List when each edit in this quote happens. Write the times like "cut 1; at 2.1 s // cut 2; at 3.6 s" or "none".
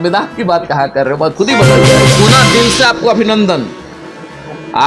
cut 1; at 2.1 s